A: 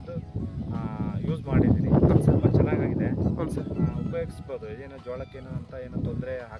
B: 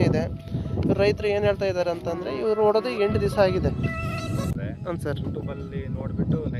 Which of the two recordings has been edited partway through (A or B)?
B